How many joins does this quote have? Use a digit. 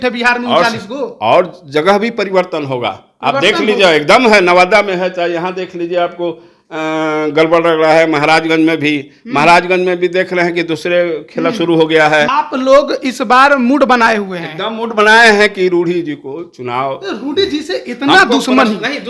1